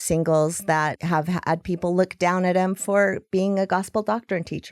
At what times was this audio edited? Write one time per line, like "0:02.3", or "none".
0:01.0